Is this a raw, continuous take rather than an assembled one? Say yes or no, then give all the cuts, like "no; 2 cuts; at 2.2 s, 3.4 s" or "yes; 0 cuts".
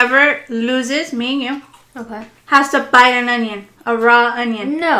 yes; 0 cuts